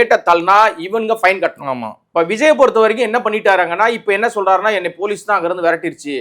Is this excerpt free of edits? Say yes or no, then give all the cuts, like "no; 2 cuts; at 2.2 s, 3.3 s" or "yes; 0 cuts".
no; 1 cut; at 2.0 s